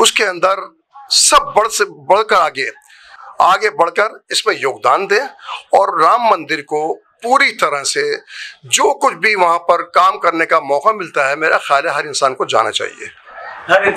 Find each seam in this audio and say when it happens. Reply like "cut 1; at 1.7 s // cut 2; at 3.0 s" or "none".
none